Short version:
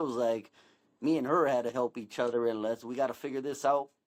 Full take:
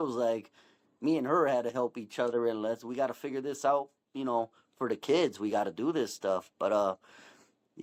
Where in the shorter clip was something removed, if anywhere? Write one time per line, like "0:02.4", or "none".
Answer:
none